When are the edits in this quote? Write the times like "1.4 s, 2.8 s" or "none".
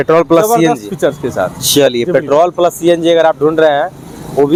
none